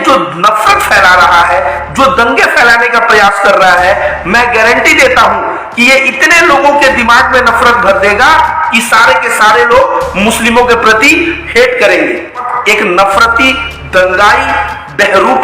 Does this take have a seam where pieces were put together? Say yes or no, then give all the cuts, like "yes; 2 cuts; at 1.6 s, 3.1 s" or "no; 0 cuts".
yes; 1 cut; at 12.5 s